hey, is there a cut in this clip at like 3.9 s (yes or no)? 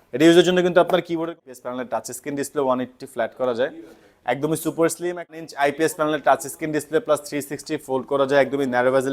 no